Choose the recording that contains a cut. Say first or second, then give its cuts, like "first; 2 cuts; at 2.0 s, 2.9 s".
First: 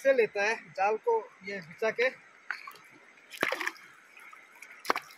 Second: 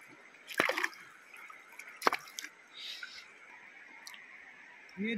second; 1 cut; at 3.5 s